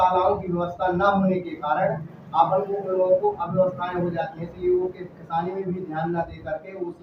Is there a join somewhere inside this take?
no; 0 cuts

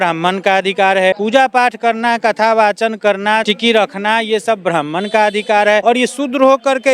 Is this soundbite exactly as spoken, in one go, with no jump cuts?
no; 3 cuts; at 1.2 s, 3.5 s, 5.8 s

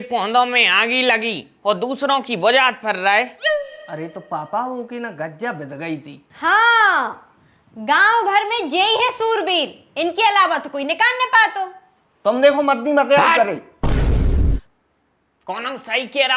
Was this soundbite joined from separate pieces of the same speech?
no; 0 cuts

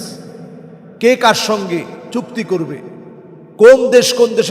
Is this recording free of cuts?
yes; 0 cuts

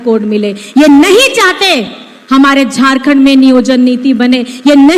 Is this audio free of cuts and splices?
yes; 0 cuts

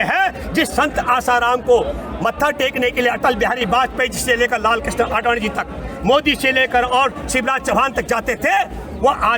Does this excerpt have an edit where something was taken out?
no; 0 cuts

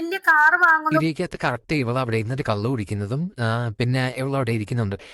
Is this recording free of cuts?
no; 1 cut; at 1.0 s

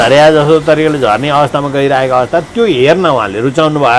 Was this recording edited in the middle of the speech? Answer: no; 0 cuts

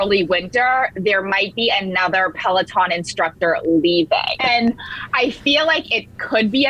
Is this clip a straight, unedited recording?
no; 1 cut; at 4.3 s

